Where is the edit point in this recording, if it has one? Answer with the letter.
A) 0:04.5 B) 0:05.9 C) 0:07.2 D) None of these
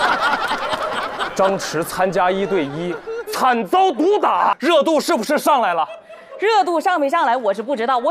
A